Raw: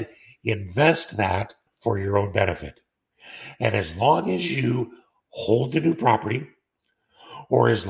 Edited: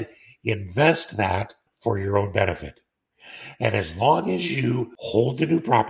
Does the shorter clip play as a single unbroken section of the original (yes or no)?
no